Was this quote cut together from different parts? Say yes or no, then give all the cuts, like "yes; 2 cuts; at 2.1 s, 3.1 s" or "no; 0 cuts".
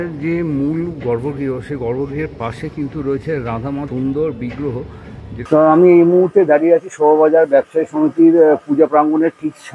yes; 1 cut; at 5.3 s